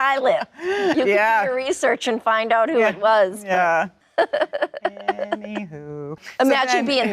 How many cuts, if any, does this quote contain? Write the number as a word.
two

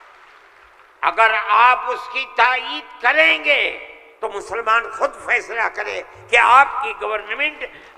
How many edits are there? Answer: zero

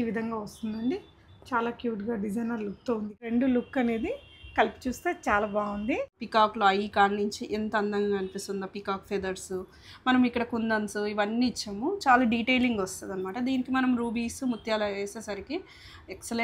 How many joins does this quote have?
two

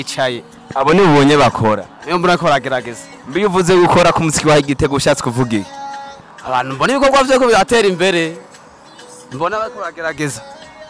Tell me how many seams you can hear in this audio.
zero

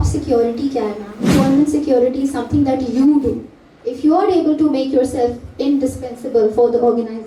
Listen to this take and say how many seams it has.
one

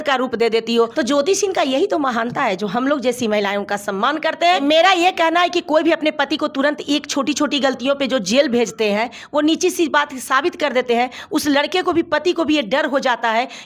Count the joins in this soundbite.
two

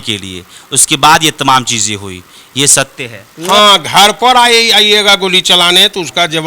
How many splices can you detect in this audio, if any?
one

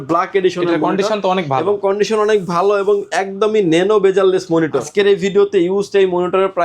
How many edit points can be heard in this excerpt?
one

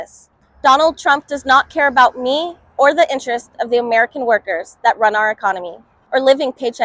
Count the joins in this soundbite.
one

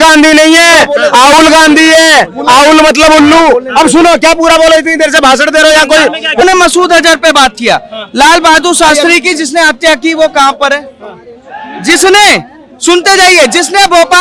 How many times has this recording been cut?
one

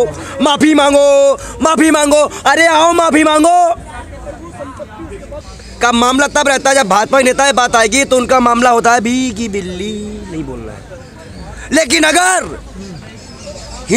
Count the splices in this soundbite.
zero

